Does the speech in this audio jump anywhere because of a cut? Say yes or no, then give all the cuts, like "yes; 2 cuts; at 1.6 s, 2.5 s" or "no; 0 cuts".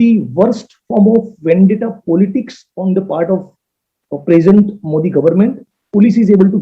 yes; 1 cut; at 5.6 s